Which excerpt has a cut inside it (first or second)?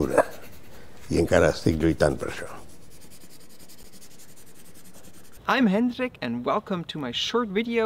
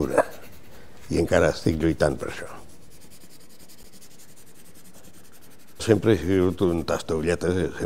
first